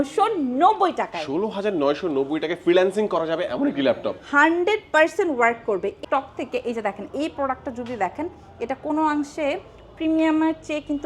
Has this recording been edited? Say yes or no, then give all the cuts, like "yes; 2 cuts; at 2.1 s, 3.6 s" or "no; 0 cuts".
yes; 1 cut; at 6.0 s